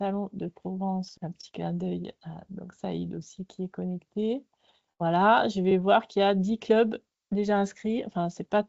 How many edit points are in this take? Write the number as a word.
one